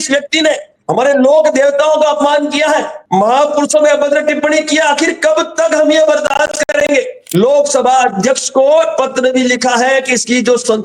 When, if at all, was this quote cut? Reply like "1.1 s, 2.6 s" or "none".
7.2 s